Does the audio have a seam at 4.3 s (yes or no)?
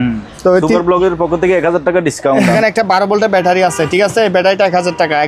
no